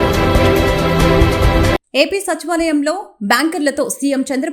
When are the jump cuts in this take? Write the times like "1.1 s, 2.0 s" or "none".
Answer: 1.7 s